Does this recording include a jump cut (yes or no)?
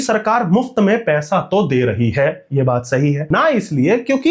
yes